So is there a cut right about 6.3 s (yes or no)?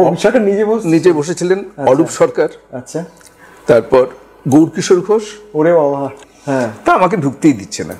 yes